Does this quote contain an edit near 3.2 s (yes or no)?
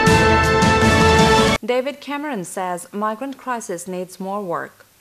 no